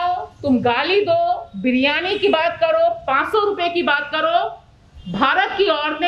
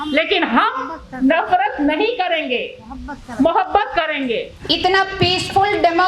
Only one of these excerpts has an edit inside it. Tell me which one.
second; 1 cut; at 4.5 s

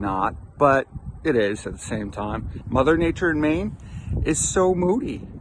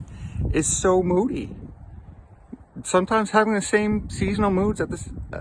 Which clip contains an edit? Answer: first; 1 cut; at 2.5 s

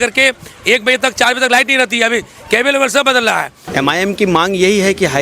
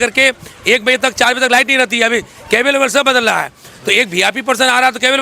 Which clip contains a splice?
first; 1 cut; at 3.6 s

